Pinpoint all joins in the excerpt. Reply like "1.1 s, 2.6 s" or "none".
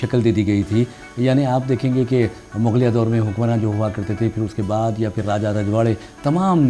none